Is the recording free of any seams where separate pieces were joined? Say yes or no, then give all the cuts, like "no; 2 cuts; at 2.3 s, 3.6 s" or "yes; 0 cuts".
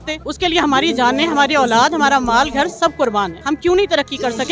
no; 1 cut; at 3.3 s